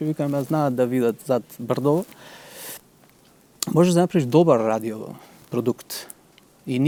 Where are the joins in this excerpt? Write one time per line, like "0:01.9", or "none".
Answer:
none